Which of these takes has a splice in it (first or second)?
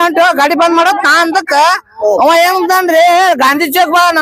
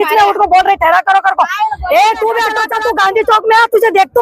second